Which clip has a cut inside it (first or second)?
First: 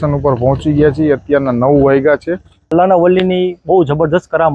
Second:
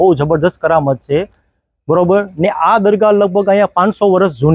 first